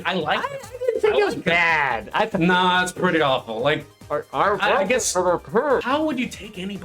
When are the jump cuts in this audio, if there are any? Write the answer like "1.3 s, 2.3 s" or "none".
5.8 s